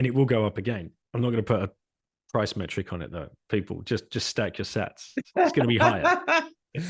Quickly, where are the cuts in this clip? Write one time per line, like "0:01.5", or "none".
0:01.0